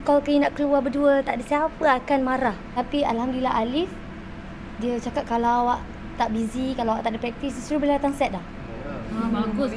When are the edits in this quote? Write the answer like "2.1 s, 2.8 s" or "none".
2.6 s